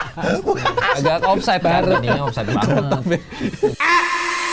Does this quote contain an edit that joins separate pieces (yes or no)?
no